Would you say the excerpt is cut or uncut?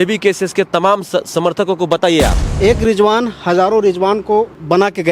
cut